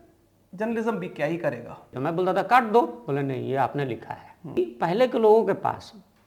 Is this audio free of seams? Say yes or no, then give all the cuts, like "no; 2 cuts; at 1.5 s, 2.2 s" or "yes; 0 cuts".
no; 2 cuts; at 1.9 s, 4.5 s